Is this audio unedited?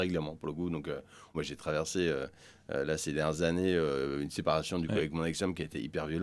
no; 1 cut; at 1.3 s

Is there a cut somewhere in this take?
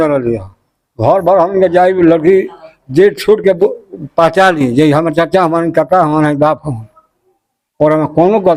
no; 0 cuts

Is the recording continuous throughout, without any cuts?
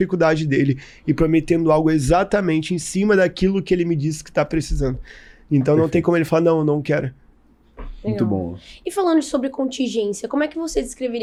yes; 0 cuts

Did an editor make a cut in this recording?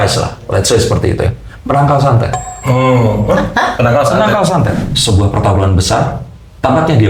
yes; 1 cut; at 4.9 s

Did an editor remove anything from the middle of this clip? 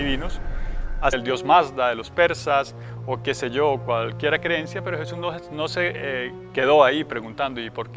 no; 0 cuts

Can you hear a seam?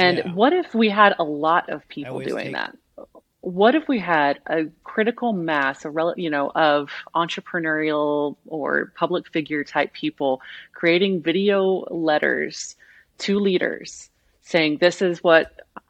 no; 0 cuts

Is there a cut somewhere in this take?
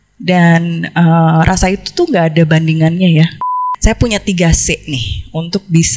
yes; 1 cut; at 3.6 s

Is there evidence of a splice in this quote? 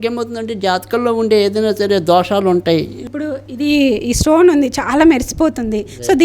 yes; 1 cut; at 3.1 s

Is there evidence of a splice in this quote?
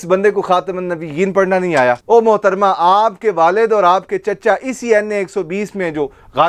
yes; 1 cut; at 2.0 s

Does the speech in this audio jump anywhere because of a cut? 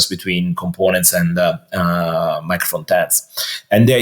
no; 0 cuts

